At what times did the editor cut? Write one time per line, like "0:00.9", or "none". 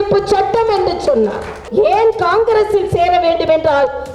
0:01.6